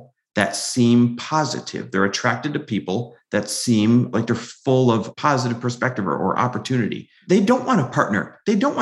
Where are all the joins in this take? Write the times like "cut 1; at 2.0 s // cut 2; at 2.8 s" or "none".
cut 1; at 4.1 s // cut 2; at 5.1 s